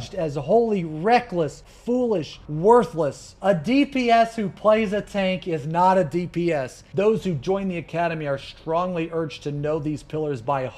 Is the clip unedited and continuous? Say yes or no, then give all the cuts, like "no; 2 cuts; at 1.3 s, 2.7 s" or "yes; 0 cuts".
no; 2 cuts; at 3.3 s, 6.8 s